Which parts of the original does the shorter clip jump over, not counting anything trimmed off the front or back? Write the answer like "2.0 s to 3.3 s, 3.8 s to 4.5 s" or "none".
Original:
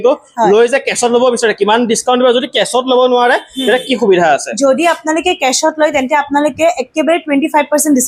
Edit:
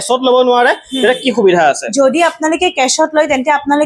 none